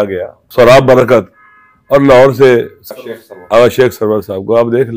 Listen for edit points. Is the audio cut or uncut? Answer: cut